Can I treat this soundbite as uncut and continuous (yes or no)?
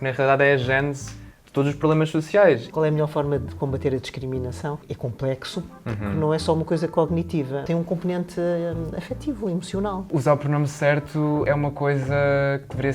no